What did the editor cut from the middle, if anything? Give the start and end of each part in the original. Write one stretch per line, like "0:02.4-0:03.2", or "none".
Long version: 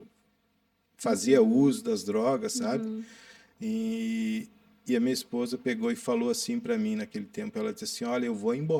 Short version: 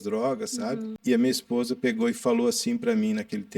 0:02.9-0:04.7